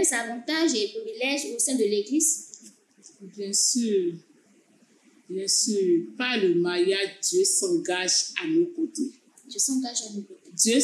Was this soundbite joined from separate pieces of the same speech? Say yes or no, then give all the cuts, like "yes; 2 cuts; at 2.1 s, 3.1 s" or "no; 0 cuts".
no; 0 cuts